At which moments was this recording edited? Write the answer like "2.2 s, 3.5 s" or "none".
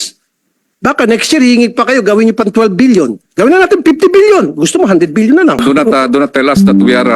5.6 s